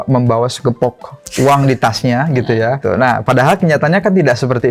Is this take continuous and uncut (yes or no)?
no